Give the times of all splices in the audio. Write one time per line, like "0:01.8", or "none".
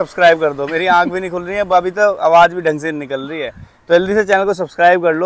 none